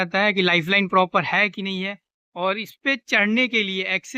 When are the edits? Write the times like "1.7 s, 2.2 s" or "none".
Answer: none